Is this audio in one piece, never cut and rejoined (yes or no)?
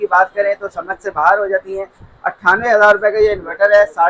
yes